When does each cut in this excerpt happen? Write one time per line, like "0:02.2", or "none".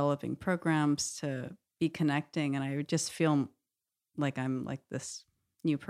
0:01.6